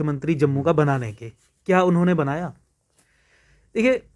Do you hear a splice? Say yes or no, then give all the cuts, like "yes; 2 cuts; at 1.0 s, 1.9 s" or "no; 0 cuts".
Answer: no; 0 cuts